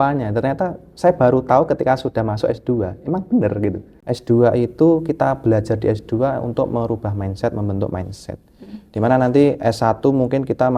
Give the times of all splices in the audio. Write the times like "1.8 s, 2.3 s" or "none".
3.9 s

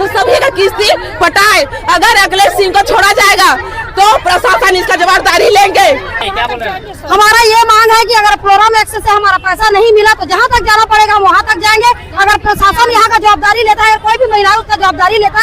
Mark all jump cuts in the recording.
6.1 s

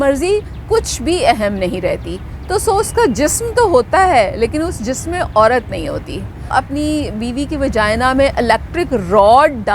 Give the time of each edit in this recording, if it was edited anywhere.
6.5 s

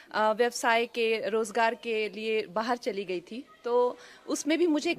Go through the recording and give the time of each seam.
none

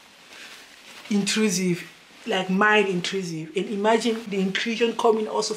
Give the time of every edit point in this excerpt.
4.3 s

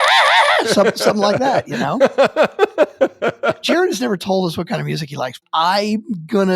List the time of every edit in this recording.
1.5 s, 3.6 s, 5.4 s

